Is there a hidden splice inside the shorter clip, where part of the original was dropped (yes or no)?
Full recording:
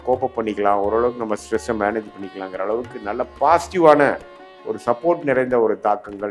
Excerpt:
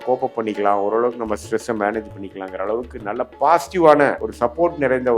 yes